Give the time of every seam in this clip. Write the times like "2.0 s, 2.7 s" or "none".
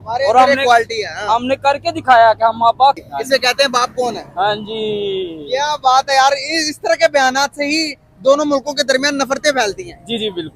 3.0 s